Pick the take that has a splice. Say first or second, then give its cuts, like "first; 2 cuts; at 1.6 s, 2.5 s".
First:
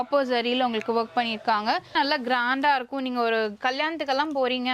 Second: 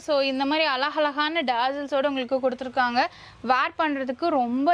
first; 1 cut; at 1.9 s